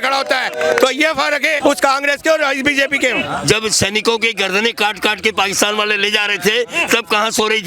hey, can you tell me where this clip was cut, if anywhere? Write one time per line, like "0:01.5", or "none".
0:01.6
0:03.2